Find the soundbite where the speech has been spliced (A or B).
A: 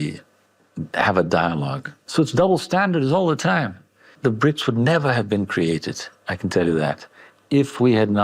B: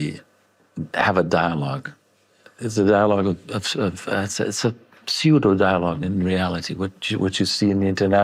A